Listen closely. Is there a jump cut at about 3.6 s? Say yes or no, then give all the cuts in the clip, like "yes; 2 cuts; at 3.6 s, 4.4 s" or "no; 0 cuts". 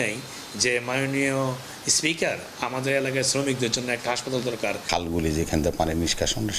no; 1 cut; at 4.8 s